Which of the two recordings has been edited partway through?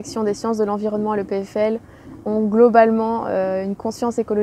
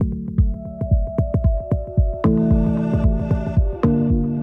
second; 1 cut; at 3.4 s

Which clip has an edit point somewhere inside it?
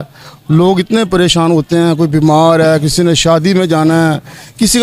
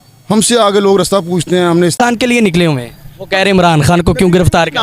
second; 1 cut; at 2.0 s

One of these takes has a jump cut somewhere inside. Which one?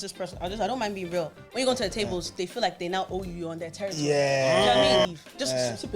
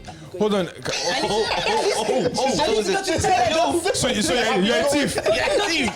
first; 1 cut; at 5.1 s

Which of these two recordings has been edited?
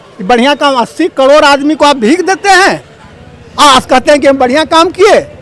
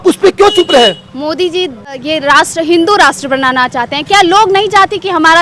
second; 1 cut; at 1.9 s

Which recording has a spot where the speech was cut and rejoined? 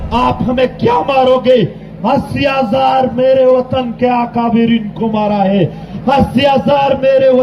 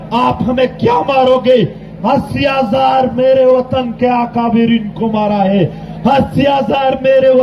first; 1 cut; at 5.9 s

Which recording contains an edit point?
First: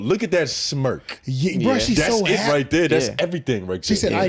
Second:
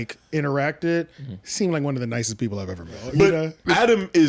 second; 1 cut; at 3.0 s

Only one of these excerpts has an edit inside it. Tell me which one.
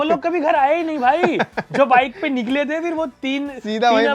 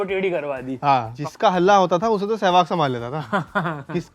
second; 1 cut; at 1.1 s

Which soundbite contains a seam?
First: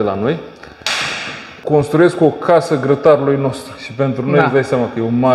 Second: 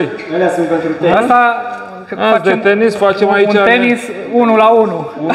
first; 1 cut; at 1.5 s

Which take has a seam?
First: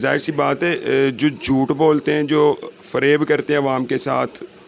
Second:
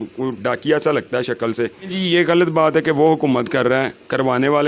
second; 1 cut; at 2.0 s

